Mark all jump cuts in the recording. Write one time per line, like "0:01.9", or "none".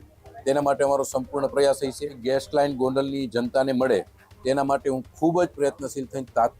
0:02.2